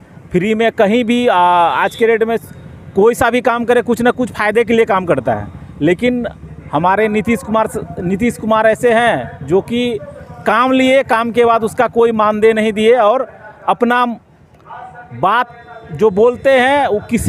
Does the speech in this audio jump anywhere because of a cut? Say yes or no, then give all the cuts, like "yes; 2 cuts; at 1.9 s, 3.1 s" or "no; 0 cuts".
no; 0 cuts